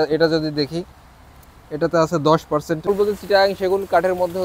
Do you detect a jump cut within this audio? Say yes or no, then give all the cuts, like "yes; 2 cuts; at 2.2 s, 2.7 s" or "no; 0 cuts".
yes; 1 cut; at 2.9 s